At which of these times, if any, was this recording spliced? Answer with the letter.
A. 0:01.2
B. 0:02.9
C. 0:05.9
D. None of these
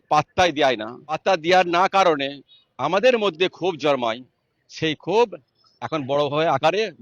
A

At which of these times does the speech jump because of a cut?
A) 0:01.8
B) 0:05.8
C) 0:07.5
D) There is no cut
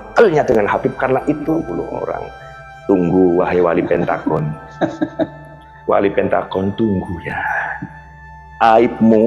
A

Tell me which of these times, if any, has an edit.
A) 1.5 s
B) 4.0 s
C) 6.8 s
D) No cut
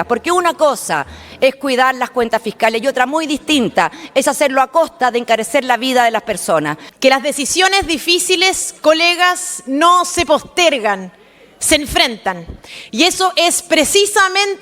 C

